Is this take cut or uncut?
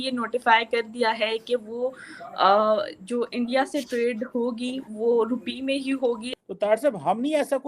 cut